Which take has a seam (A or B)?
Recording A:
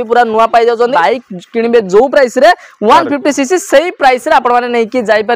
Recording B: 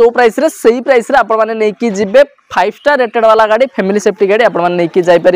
A